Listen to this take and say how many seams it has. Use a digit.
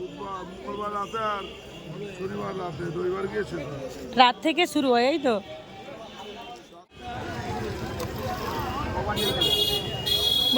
1